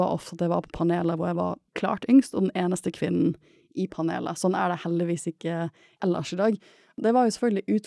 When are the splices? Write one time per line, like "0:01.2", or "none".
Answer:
0:01.6
0:05.8
0:07.0